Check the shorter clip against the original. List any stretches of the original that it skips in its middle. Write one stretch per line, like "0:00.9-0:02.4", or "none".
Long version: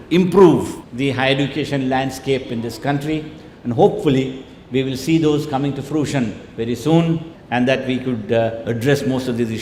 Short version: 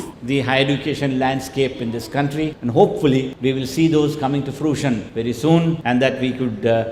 0:03.3-0:03.6
0:04.3-0:04.6
0:06.4-0:06.5
0:07.2-0:07.5